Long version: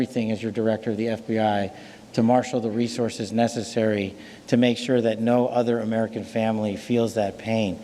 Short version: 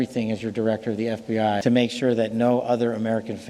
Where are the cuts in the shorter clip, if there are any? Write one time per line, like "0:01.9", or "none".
0:01.6